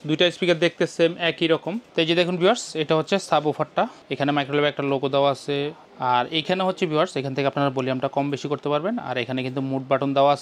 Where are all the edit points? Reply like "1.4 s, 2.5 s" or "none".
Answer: 1.8 s, 4.0 s, 5.8 s